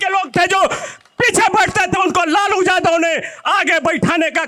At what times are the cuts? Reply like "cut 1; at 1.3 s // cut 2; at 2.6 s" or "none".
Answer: none